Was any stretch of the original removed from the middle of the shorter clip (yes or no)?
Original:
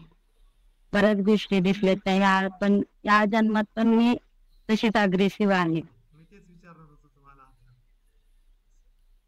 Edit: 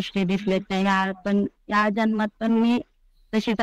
no